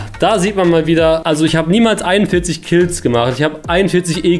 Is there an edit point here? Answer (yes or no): yes